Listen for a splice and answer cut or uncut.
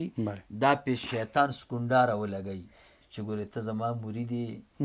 uncut